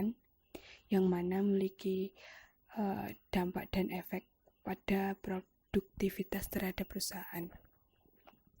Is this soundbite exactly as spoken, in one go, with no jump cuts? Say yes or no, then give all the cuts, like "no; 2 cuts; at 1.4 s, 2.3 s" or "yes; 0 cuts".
no; 1 cut; at 3.2 s